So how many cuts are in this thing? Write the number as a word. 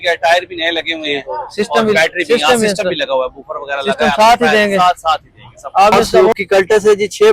one